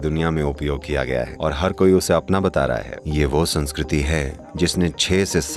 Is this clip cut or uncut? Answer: cut